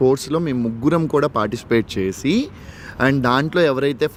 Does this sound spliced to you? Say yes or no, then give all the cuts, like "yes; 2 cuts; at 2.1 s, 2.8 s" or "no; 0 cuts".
no; 0 cuts